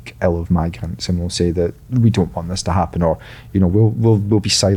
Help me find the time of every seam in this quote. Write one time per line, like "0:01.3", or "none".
none